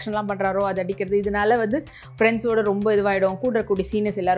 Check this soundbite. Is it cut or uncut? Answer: uncut